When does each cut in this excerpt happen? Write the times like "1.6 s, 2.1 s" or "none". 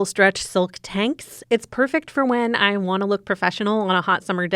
1.4 s

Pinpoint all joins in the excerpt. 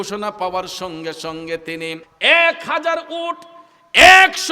2.1 s

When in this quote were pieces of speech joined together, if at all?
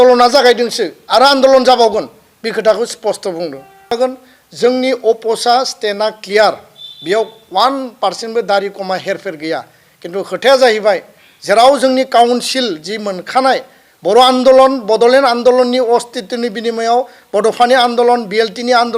3.9 s

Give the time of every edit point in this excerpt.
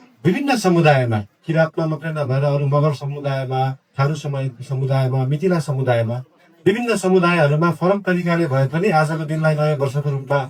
none

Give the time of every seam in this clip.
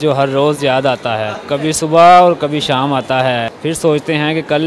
1.4 s, 3.5 s

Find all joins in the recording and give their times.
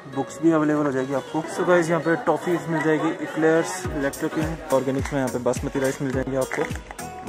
1.5 s, 4.7 s

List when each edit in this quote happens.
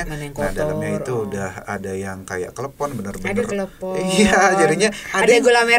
none

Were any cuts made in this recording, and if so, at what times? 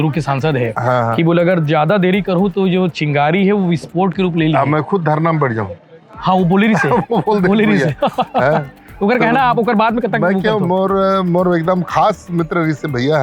none

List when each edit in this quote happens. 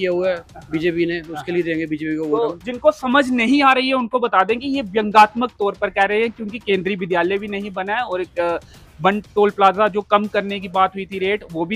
none

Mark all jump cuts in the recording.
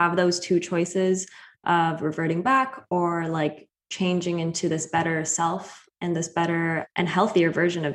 6.9 s

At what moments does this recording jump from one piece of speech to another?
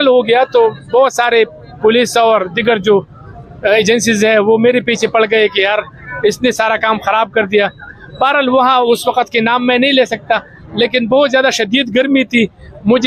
none

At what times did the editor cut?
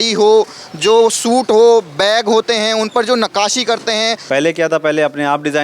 4.2 s

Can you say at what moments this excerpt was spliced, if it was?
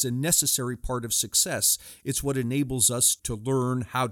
3.2 s

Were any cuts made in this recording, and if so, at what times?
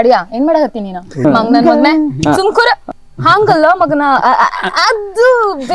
1.2 s, 2.8 s

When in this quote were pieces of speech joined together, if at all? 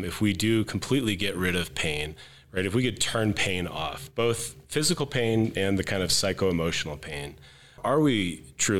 7.8 s

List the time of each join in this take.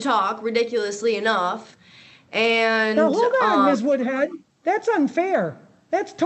none

